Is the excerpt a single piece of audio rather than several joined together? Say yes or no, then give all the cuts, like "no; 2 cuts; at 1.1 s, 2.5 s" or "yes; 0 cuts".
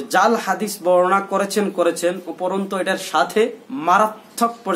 no; 1 cut; at 3.6 s